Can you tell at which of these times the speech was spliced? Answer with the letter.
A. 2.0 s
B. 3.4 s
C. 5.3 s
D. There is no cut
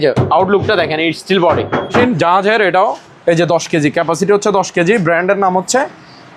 A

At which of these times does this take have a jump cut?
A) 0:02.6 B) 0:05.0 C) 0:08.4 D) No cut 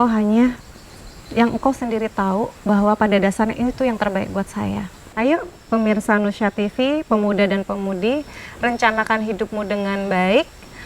B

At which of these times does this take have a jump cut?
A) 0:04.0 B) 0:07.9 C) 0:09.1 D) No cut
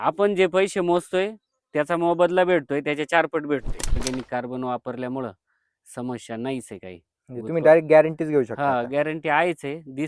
A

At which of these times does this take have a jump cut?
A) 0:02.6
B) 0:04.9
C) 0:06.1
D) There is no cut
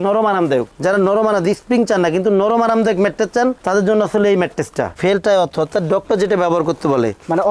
B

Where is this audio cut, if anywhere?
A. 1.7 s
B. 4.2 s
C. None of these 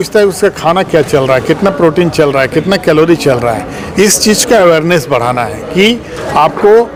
C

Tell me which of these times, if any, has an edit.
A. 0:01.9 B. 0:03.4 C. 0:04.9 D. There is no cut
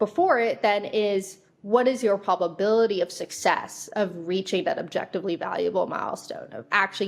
D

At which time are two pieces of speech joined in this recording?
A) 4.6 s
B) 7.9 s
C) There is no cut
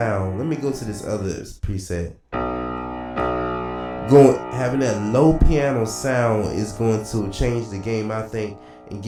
C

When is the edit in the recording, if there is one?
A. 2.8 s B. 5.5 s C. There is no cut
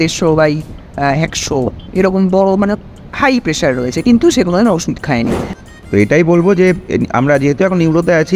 B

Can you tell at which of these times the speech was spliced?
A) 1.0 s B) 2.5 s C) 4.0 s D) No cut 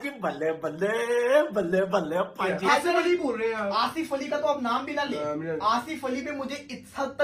B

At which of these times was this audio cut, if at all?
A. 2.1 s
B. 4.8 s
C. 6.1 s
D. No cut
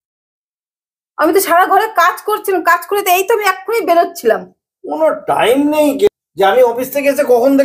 C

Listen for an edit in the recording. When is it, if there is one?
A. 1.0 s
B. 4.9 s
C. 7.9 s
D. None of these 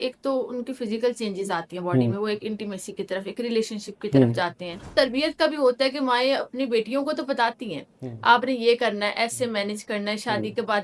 B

